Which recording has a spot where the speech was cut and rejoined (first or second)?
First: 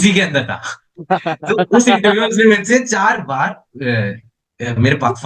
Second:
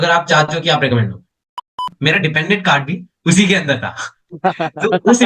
second